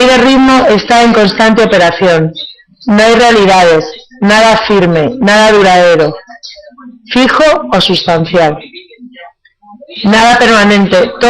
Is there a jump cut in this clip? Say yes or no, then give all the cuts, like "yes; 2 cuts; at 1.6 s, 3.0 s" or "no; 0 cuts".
no; 0 cuts